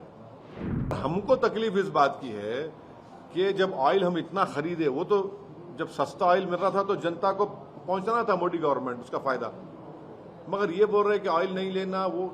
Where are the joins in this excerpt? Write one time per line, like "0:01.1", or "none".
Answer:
0:00.9